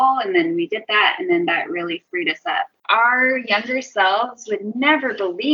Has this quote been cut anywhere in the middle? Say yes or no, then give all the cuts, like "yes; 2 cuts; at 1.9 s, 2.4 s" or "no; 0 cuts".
yes; 1 cut; at 2.8 s